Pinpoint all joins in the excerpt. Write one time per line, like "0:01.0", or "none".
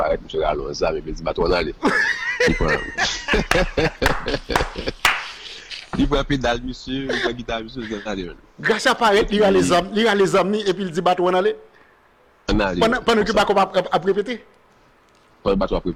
none